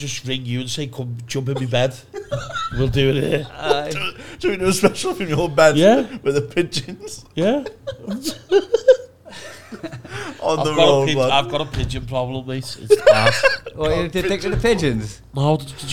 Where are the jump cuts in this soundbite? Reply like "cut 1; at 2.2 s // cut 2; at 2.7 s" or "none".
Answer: none